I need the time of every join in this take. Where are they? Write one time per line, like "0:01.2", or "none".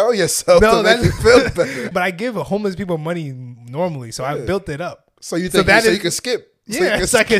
0:01.9